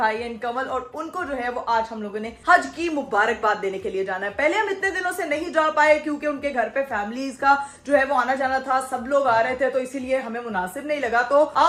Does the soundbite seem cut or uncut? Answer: uncut